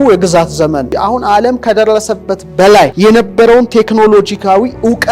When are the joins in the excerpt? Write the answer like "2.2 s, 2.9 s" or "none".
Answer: 0.9 s, 2.9 s